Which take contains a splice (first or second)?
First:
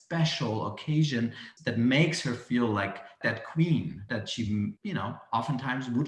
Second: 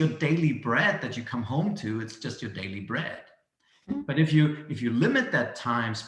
first